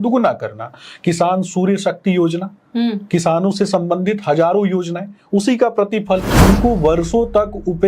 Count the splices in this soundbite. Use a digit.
1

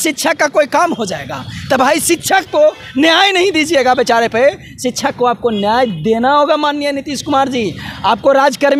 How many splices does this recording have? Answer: 0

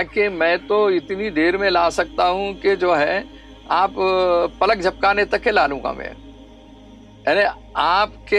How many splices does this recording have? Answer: 0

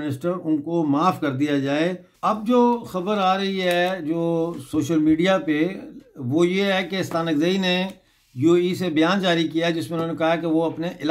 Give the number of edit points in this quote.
1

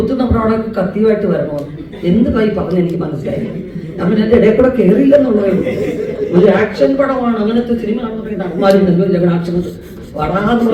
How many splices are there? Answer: 0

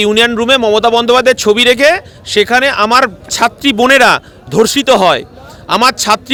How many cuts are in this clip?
0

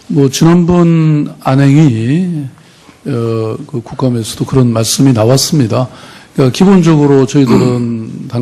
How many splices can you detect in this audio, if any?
1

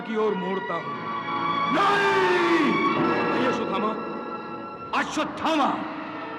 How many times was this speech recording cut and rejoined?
0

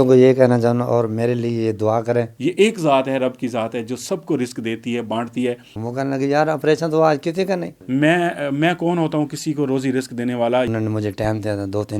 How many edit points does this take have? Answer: 4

